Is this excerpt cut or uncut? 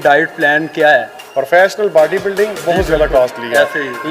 cut